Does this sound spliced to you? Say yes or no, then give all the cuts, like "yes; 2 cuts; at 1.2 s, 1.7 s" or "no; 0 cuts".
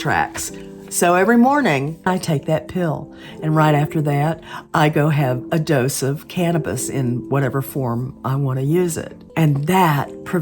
yes; 3 cuts; at 2.1 s, 5.4 s, 9.2 s